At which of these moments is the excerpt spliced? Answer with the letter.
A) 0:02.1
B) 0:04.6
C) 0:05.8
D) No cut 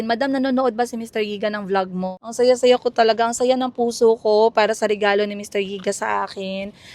A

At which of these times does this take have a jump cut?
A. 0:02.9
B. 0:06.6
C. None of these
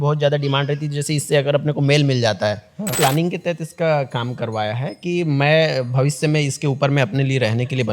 A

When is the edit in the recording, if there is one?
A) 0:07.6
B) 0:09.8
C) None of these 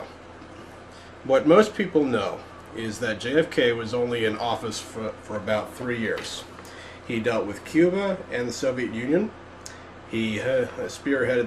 A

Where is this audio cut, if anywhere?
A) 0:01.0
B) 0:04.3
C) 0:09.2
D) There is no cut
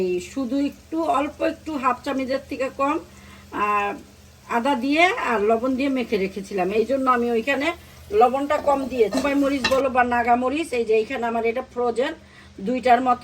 C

